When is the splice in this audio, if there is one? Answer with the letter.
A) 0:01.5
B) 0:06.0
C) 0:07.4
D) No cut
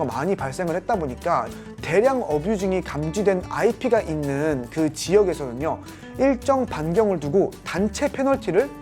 A